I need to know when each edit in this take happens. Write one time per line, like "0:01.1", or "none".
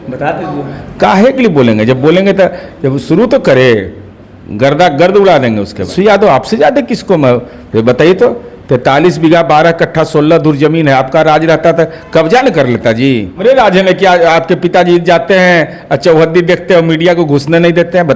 0:05.9
0:13.4

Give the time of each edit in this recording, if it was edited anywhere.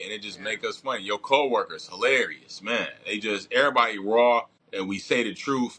0:04.6

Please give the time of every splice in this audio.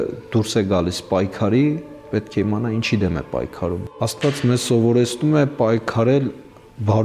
0:03.8

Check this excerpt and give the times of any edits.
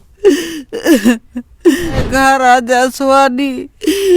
0:02.1

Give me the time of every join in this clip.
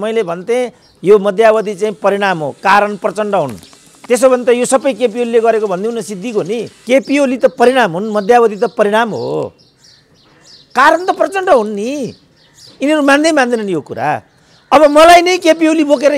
0:06.7

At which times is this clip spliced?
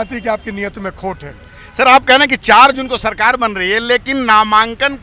none

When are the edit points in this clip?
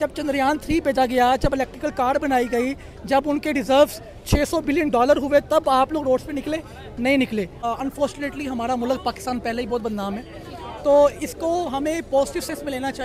0:07.6

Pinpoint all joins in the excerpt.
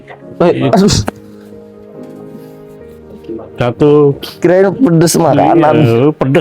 0:01.1
0:03.3

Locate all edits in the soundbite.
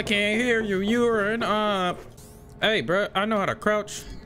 0:02.3

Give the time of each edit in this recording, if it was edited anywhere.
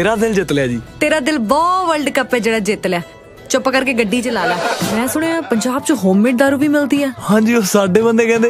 0:04.9

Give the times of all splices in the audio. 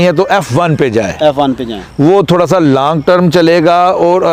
none

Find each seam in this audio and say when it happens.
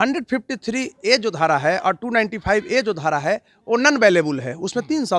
none

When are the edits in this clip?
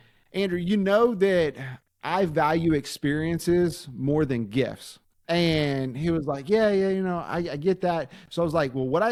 none

